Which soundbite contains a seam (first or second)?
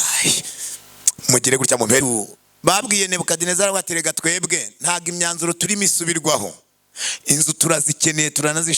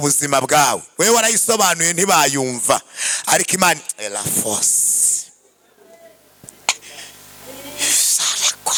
first